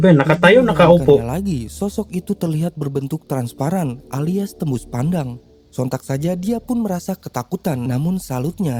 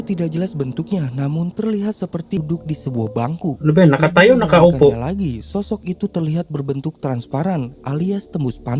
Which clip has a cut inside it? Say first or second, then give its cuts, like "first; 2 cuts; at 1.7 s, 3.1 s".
second; 1 cut; at 2.4 s